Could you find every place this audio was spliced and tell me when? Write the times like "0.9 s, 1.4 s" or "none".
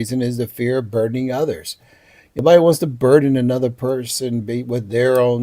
2.4 s